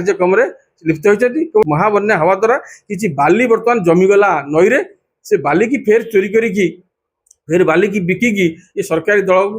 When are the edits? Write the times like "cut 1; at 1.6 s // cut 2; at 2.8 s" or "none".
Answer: cut 1; at 1.6 s